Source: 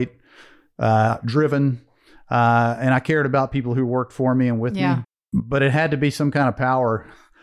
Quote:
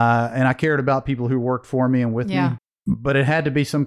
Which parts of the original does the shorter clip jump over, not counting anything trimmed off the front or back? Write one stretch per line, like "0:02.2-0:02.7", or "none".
none